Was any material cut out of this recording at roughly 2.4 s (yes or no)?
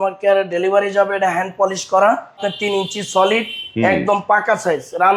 yes